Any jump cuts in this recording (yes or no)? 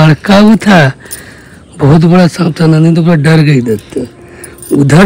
no